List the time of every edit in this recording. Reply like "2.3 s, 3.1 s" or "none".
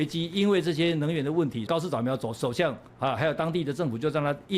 1.7 s